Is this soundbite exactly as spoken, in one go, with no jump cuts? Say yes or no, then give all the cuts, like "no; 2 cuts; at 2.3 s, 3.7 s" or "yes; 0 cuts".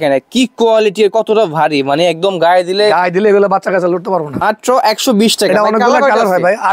no; 1 cut; at 4.4 s